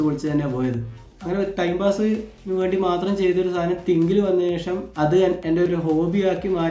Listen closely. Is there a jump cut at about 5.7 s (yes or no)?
yes